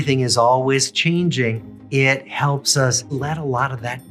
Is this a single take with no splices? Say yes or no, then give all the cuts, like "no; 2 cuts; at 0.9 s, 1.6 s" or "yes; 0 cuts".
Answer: no; 2 cuts; at 1.7 s, 3.1 s